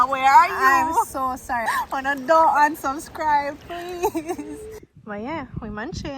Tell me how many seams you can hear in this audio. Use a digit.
2